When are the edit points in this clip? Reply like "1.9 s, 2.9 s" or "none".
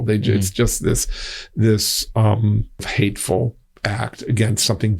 2.9 s, 3.7 s